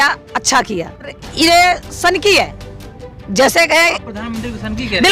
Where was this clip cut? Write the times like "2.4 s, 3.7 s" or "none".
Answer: 1.2 s